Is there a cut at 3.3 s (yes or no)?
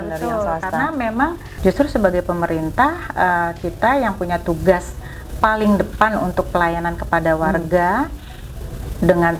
no